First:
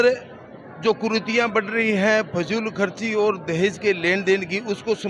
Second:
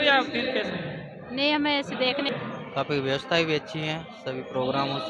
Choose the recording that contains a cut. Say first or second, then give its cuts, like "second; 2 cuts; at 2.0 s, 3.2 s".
second; 1 cut; at 2.3 s